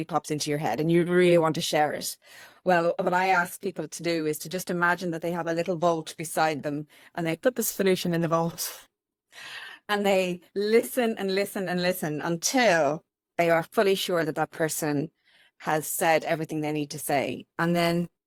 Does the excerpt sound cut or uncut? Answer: uncut